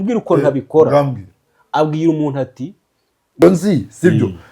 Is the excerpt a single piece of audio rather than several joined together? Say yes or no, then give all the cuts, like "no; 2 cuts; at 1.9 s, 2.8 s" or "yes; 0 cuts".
no; 1 cut; at 3.4 s